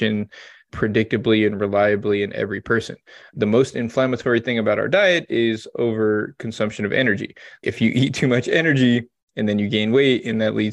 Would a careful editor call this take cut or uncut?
cut